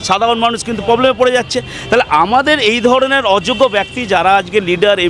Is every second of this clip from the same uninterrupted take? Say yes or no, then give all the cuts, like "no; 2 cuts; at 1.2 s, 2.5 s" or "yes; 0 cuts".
yes; 0 cuts